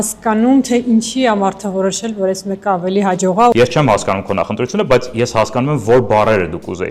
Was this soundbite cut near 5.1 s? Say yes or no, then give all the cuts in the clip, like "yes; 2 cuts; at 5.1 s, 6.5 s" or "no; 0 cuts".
no; 1 cut; at 3.5 s